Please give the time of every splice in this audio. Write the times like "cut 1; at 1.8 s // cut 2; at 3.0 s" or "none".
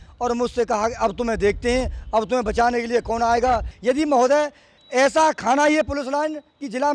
cut 1; at 3.7 s

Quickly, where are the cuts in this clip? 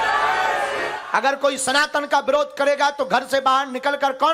cut 1; at 1.6 s

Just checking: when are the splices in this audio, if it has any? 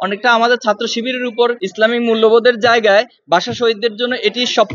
cut 1; at 1.6 s

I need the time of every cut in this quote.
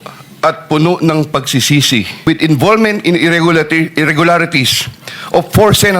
cut 1; at 2.1 s

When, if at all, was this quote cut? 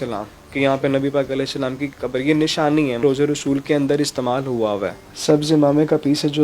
cut 1; at 3.0 s // cut 2; at 4.9 s

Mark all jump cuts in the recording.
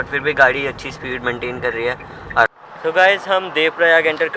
cut 1; at 2.5 s

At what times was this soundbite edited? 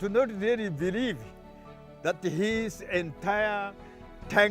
none

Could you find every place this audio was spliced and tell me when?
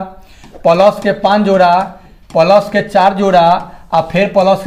none

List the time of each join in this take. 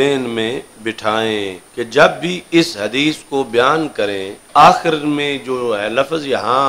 cut 1; at 1.6 s // cut 2; at 4.4 s

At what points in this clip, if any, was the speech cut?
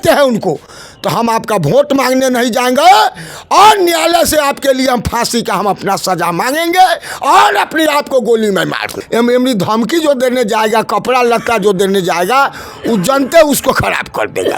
cut 1; at 9.0 s

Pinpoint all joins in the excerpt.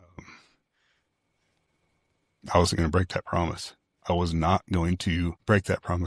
none

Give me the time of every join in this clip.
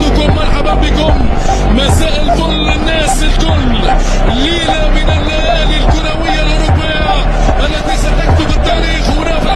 none

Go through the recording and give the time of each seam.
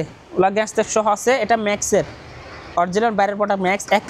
none

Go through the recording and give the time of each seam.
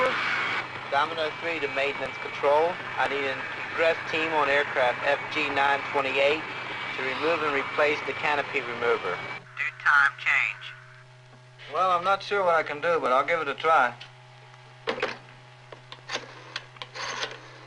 cut 1; at 3.0 s

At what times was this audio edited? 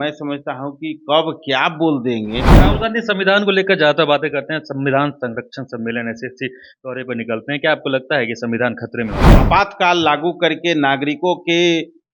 cut 1; at 2.5 s // cut 2; at 9.3 s

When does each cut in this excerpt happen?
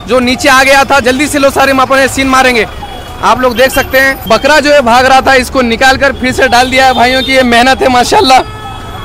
none

